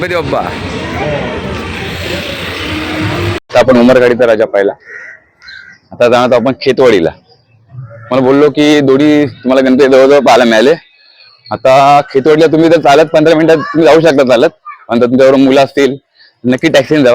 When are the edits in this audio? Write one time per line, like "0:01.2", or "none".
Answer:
0:03.4